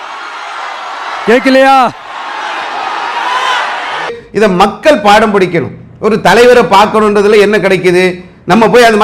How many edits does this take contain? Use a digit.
0